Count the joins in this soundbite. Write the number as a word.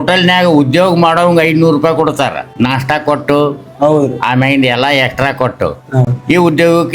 one